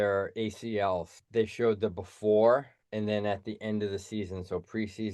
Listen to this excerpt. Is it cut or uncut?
cut